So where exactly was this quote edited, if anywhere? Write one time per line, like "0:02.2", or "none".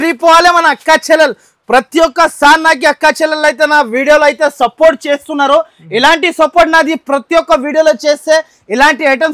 none